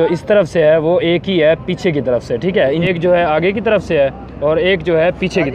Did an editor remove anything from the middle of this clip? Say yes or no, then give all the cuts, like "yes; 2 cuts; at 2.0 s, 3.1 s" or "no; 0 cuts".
yes; 1 cut; at 2.9 s